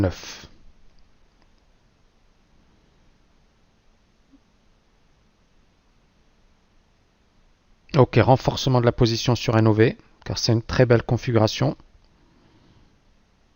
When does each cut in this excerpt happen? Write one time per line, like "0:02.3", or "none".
0:10.7